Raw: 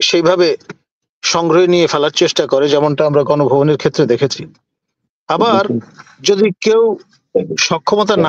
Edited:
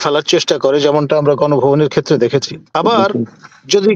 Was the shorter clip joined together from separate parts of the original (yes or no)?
yes